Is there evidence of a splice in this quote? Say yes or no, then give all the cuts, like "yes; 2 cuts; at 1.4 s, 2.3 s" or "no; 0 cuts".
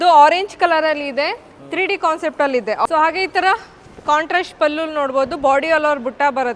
yes; 1 cut; at 2.9 s